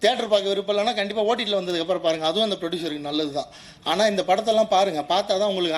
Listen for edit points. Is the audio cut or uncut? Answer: uncut